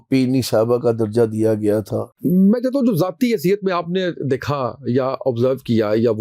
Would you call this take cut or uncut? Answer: cut